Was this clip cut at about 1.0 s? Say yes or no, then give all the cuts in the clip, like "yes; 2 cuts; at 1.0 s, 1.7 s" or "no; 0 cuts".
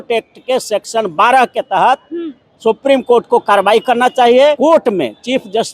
no; 1 cut; at 4.6 s